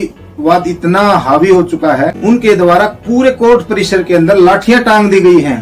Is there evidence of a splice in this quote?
yes; 1 cut; at 2.2 s

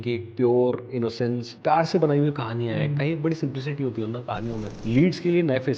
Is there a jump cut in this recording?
yes; 2 cuts; at 1.5 s, 4.7 s

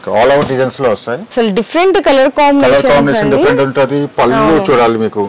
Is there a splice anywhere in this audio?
yes; 1 cut; at 1.3 s

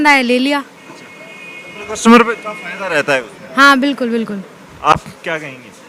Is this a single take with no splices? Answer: yes; 0 cuts

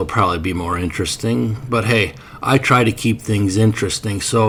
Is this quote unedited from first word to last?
yes; 0 cuts

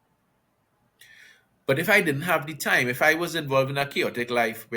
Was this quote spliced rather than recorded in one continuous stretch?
no; 0 cuts

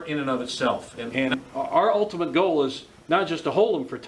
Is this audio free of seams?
no; 1 cut; at 1.0 s

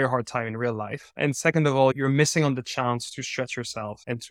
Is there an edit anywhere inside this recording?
no; 0 cuts

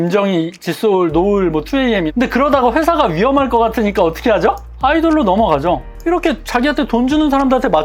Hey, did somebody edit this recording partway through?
yes; 2 cuts; at 2.1 s, 5.9 s

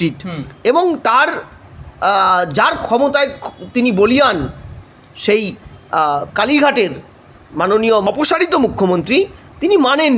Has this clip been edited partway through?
yes; 1 cut; at 8.0 s

